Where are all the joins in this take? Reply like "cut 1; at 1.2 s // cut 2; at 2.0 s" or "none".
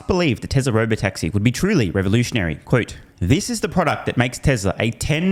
none